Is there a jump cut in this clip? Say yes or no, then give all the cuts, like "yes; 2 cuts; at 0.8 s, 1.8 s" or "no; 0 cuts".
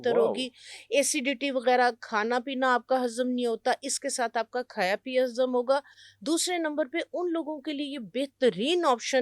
no; 0 cuts